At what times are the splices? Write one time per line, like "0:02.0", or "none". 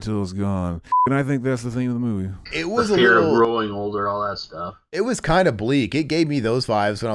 0:01.1
0:02.4